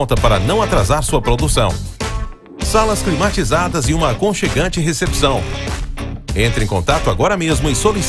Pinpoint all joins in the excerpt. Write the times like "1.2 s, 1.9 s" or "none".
none